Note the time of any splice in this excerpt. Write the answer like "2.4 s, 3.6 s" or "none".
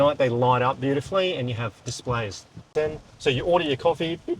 2.6 s